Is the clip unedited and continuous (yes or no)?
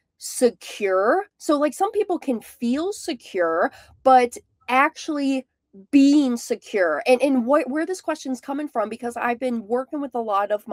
yes